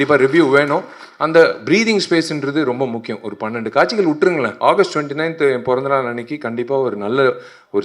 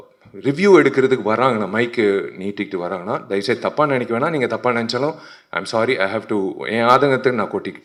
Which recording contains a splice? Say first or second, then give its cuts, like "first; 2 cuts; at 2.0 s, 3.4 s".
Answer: first; 1 cut; at 4.5 s